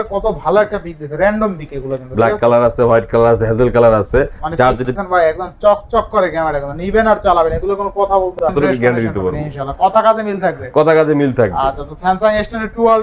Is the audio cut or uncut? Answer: cut